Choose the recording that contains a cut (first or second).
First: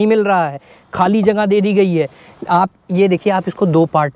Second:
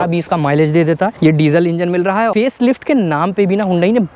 second